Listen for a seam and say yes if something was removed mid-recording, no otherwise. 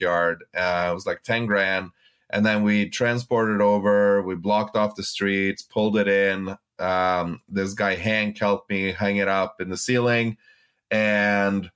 no